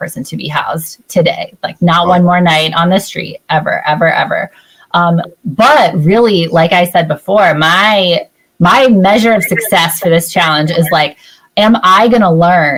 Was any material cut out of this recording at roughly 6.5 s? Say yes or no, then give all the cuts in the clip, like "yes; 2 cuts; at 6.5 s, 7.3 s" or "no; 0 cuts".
no; 0 cuts